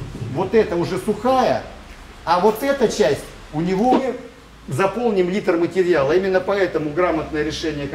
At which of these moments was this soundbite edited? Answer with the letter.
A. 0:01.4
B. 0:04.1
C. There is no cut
B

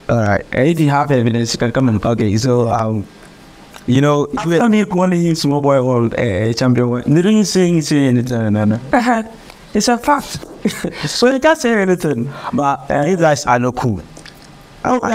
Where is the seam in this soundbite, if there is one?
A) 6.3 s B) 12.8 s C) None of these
C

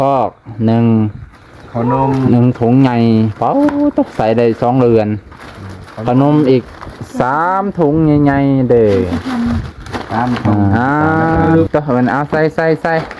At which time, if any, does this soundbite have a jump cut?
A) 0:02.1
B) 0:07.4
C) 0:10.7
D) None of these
C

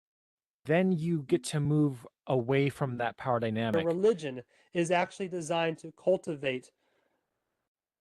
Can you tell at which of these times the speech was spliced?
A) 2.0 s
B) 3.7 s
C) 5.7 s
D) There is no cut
B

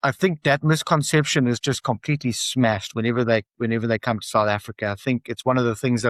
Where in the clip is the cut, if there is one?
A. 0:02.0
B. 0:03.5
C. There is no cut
C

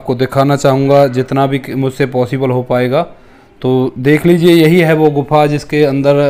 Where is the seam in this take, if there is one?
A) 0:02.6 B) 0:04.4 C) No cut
C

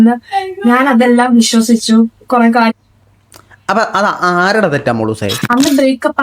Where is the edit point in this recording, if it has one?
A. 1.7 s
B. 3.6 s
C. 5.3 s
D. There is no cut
C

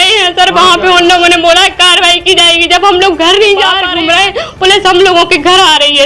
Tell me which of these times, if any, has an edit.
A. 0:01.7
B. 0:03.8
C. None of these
B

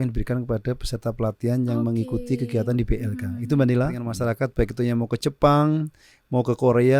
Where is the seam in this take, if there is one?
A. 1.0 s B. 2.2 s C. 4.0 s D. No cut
C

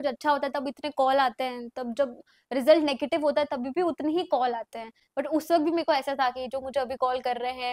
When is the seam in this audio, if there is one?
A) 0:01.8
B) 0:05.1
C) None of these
C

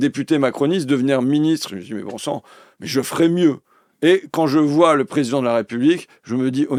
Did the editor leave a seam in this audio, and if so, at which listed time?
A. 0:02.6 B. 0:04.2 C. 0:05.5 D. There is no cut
D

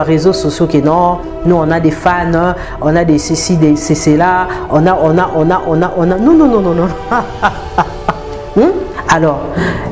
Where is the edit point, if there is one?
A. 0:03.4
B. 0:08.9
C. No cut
B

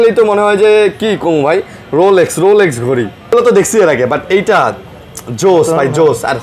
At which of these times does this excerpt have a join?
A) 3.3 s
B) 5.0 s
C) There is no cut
A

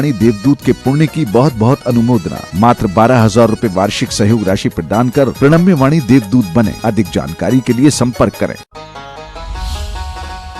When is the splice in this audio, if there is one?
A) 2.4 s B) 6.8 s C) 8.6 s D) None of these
C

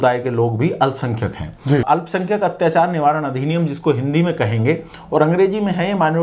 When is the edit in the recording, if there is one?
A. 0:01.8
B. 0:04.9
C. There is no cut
A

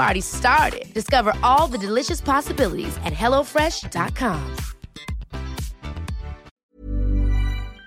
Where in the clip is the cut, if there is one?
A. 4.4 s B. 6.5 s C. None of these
B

